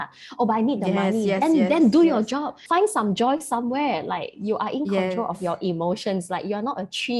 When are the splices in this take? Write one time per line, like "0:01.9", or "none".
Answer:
0:02.6

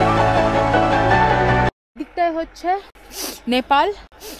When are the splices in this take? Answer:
0:01.7

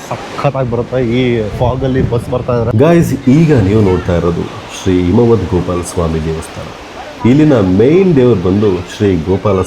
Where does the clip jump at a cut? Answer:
0:02.7

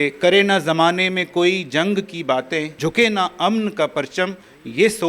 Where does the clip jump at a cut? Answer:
0:02.7

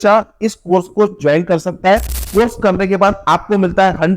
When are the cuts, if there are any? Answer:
0:02.2

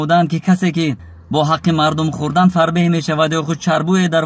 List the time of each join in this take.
0:01.1

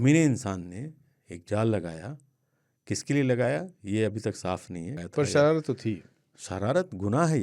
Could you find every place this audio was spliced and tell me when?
0:05.0

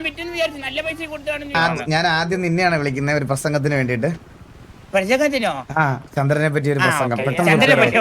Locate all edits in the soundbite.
0:01.5

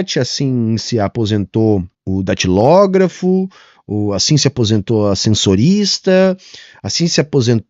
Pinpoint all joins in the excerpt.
0:02.0

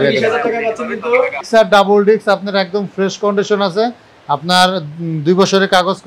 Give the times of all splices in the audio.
0:01.4

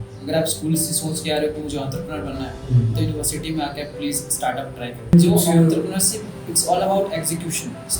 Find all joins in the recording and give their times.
0:05.1

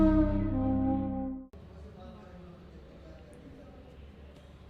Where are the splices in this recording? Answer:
0:01.5

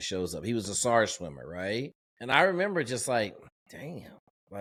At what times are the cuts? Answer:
none

